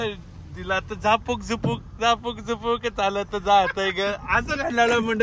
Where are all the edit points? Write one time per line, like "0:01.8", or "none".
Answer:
none